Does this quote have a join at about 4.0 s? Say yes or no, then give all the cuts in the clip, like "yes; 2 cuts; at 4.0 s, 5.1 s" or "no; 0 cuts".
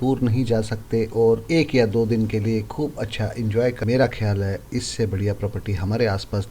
yes; 1 cut; at 4.0 s